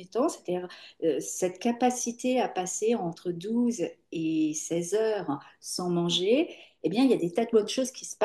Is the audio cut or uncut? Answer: uncut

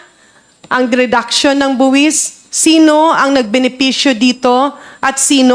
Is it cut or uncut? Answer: uncut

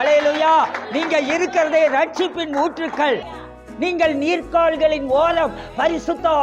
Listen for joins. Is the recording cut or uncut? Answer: cut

